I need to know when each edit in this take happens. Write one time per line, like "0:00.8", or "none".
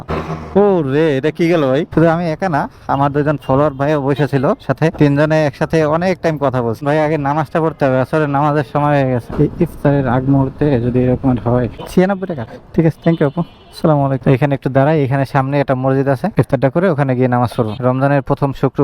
0:01.9
0:06.8
0:09.3
0:11.8
0:14.2
0:17.8